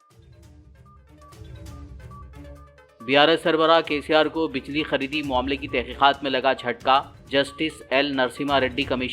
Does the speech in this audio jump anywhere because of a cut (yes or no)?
yes